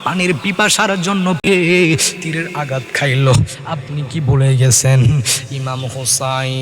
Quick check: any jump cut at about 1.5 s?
yes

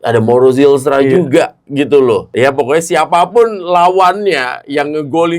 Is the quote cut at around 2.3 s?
yes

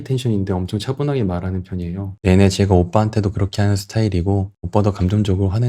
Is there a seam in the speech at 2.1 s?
yes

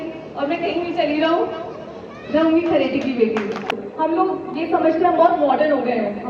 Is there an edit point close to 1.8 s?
no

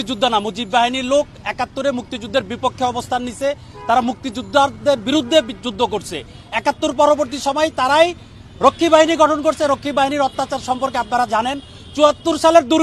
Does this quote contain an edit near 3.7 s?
no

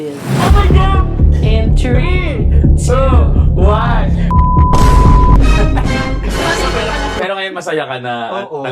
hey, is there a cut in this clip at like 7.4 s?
yes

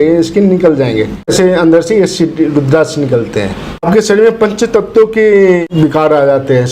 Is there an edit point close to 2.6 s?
no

